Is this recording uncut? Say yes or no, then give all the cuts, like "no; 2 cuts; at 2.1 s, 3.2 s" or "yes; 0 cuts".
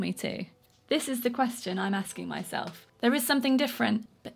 no; 1 cut; at 2.8 s